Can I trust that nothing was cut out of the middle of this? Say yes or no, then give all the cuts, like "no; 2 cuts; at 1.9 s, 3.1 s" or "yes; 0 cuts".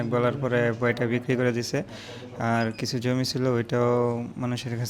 yes; 0 cuts